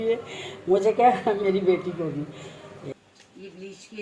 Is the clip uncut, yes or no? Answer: no